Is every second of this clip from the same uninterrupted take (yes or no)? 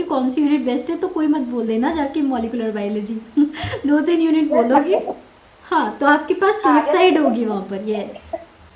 yes